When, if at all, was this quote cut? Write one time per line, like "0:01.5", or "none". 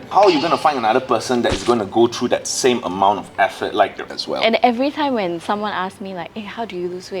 0:04.0